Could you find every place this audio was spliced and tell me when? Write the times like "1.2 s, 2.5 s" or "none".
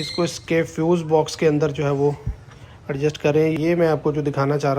3.5 s